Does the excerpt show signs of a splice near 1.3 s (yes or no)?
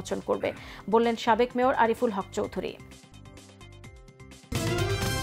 no